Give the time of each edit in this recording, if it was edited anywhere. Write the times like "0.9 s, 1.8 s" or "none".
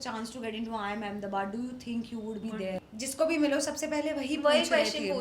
2.8 s